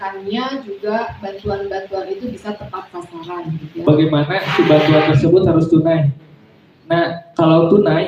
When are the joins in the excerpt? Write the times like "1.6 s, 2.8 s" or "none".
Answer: 3.6 s